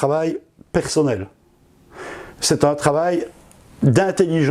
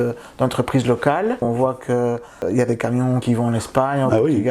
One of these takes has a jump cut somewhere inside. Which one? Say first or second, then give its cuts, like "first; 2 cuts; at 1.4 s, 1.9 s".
second; 3 cuts; at 1.4 s, 2.4 s, 3.2 s